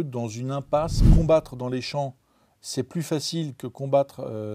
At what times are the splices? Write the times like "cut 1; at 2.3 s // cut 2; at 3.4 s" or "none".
cut 1; at 1.0 s